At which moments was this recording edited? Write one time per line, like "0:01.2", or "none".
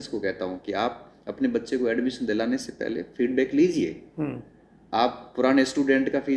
none